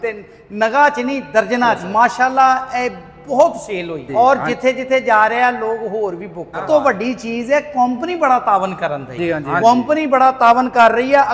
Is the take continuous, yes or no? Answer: no